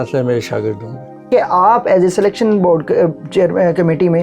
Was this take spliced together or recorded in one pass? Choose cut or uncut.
cut